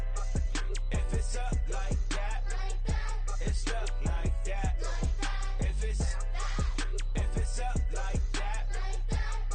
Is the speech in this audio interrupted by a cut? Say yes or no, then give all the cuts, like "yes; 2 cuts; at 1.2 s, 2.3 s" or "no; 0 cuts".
yes; 1 cut; at 6.2 s